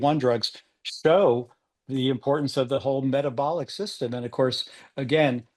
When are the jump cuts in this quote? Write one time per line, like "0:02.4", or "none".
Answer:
none